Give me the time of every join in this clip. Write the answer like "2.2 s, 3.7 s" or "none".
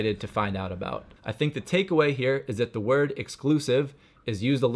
1.1 s